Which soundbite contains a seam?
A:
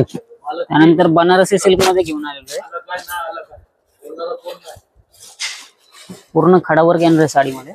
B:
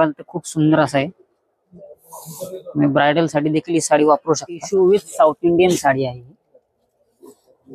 B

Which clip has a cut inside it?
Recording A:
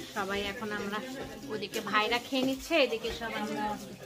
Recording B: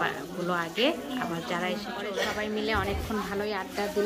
B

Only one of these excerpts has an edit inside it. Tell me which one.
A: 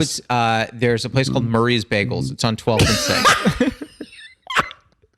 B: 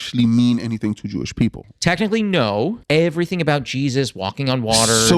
B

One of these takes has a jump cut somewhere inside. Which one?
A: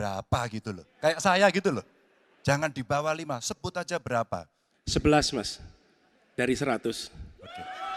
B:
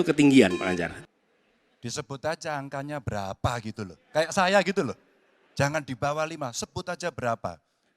B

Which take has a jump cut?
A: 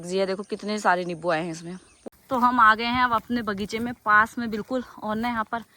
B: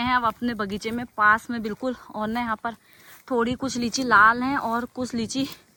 A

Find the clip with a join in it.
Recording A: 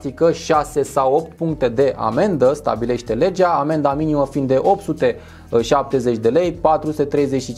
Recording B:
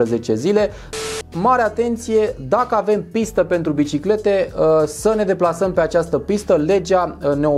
B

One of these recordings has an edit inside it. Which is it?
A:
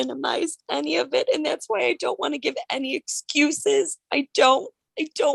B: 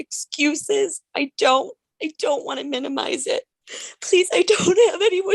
B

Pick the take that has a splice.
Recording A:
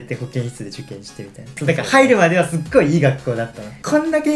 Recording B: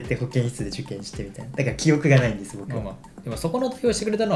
A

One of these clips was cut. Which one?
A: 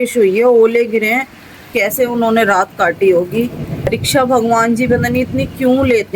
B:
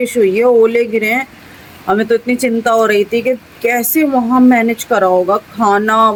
A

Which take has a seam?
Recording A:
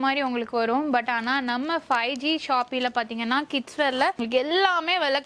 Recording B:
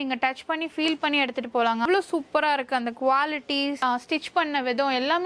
B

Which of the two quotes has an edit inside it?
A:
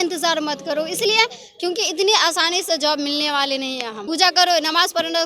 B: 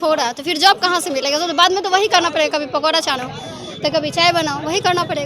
A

